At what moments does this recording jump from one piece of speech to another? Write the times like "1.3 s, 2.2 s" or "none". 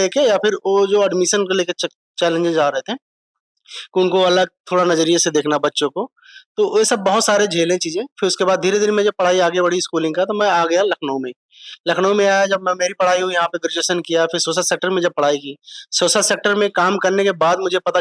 none